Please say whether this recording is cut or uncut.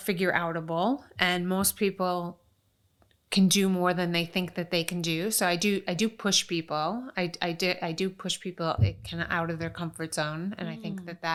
uncut